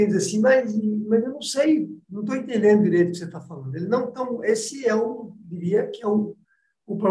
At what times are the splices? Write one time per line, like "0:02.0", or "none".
none